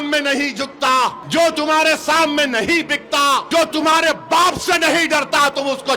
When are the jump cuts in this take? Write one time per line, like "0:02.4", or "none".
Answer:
0:01.2
0:03.5